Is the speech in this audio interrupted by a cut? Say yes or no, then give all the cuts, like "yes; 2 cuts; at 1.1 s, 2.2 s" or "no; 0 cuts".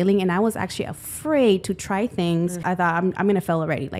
yes; 1 cut; at 2.6 s